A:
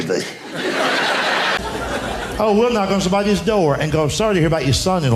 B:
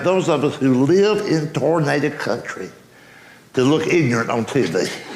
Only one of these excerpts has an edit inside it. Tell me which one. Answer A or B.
A